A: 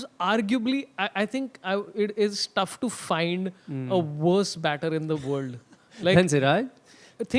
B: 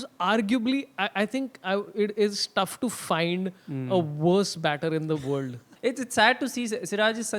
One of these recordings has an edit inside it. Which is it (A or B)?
B